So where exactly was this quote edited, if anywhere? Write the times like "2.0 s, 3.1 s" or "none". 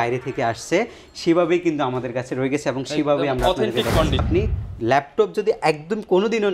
4.3 s